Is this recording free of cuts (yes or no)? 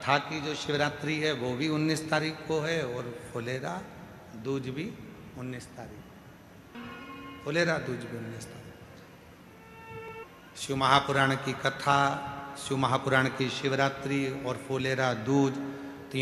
no